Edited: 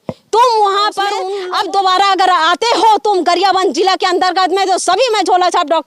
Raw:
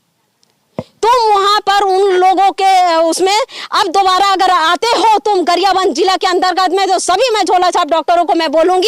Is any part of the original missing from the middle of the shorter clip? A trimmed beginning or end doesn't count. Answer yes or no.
yes